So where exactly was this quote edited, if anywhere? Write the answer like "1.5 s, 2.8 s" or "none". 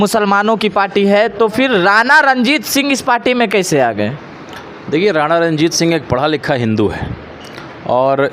none